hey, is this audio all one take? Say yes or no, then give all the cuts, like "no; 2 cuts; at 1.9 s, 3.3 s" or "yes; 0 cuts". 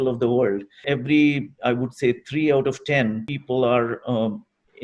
no; 2 cuts; at 0.8 s, 3.3 s